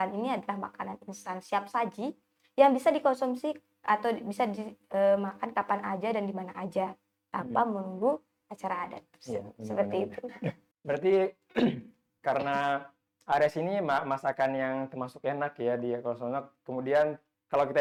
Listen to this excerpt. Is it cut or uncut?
uncut